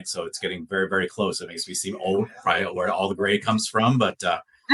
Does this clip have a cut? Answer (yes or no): no